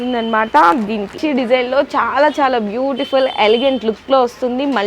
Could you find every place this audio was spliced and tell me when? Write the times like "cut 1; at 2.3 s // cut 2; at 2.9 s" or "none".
cut 1; at 1.2 s